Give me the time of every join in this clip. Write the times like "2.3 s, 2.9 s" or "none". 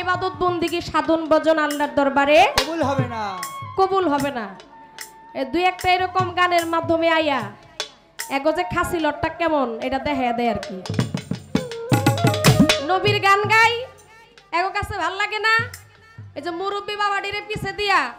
none